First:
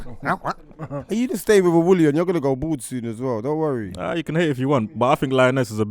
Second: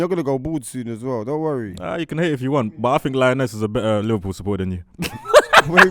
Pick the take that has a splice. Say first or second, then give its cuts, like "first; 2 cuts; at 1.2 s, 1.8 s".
first; 1 cut; at 1.0 s